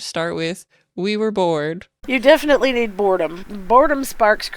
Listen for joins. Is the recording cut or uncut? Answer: cut